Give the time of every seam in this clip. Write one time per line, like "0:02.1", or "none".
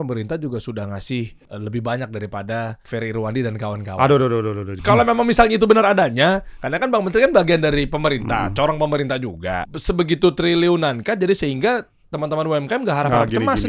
0:01.4
0:02.8
0:04.7
0:09.7